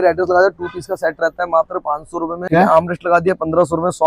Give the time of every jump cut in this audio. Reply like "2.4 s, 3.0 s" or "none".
2.5 s